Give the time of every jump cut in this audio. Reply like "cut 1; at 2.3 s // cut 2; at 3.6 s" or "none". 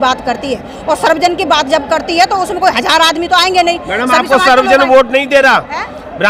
none